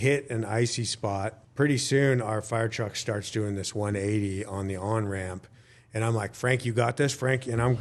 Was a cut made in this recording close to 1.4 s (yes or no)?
yes